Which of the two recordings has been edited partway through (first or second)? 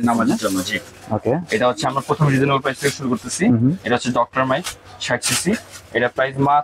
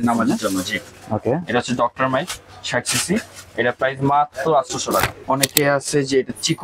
second